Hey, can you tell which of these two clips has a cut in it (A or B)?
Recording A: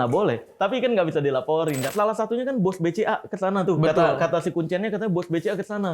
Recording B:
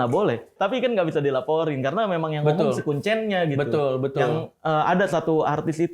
A